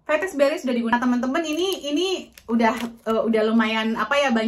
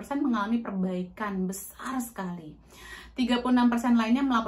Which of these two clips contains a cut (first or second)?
first